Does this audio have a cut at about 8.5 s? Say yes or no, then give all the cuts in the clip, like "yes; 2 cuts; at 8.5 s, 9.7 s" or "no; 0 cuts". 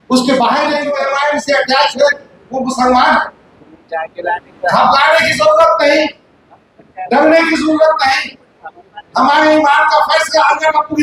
no; 1 cut; at 0.9 s